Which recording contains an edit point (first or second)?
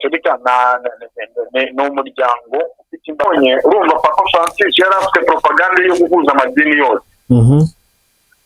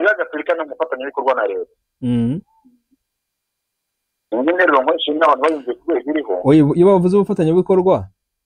first